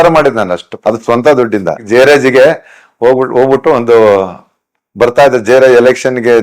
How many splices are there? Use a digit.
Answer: 1